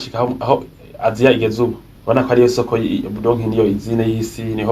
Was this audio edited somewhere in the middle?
yes; 1 cut; at 1.9 s

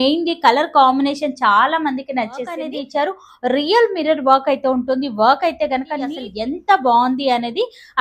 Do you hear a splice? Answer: yes; 2 cuts; at 2.6 s, 6.3 s

